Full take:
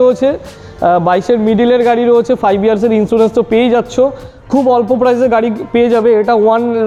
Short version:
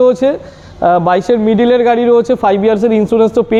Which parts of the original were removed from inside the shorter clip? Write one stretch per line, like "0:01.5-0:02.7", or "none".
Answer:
none